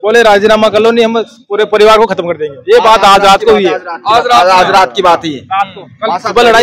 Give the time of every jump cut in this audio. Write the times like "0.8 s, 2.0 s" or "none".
none